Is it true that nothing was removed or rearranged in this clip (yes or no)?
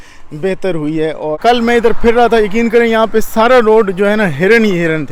no